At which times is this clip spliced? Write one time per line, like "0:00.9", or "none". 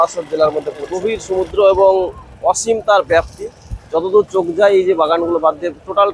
0:01.2

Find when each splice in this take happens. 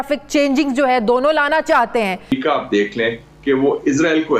0:02.3

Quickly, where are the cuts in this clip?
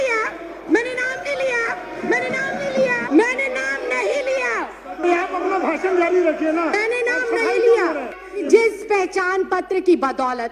0:03.0
0:08.4

